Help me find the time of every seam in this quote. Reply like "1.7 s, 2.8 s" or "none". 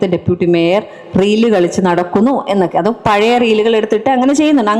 none